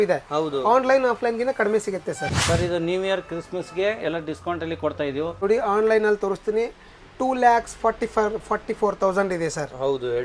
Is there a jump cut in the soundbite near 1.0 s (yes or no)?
no